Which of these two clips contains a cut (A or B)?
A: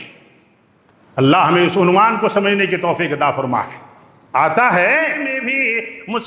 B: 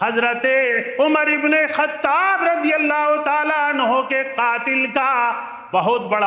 A